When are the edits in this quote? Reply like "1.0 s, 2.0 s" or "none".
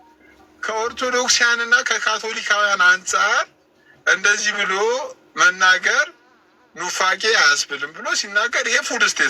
none